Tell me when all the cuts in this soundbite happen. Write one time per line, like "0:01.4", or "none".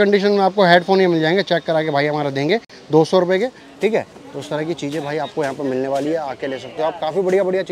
none